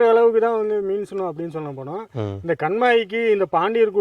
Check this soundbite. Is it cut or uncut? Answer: uncut